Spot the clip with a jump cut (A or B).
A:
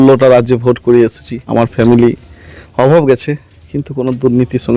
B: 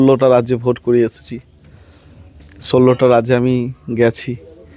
A